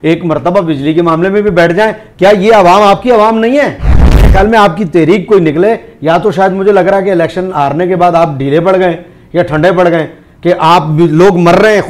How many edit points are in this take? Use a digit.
1